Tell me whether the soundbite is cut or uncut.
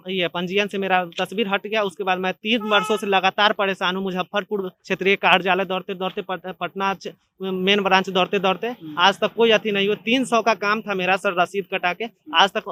uncut